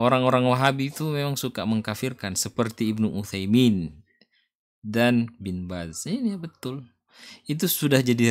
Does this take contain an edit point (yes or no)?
no